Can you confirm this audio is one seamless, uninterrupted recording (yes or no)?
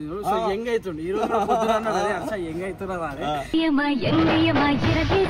yes